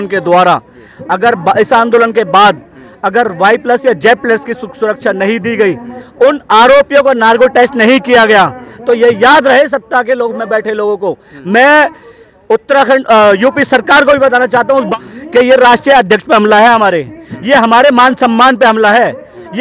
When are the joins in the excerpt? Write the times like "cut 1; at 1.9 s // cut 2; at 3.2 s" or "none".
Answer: cut 1; at 14.9 s